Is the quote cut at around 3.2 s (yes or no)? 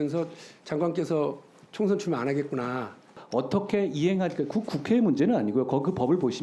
yes